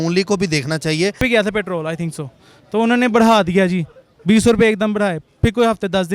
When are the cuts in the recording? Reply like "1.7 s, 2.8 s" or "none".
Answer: 1.2 s